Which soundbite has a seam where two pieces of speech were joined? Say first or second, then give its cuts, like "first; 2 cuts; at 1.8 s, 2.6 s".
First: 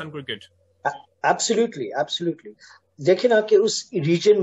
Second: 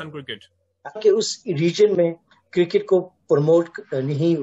second; 1 cut; at 1.0 s